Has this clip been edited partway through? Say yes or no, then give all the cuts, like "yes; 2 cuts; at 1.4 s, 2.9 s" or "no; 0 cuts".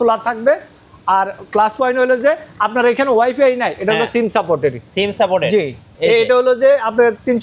yes; 1 cut; at 5.8 s